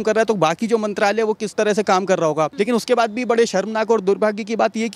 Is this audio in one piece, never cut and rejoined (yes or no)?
no